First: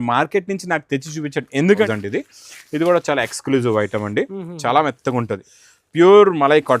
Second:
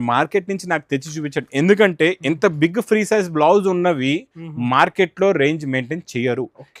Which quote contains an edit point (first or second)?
first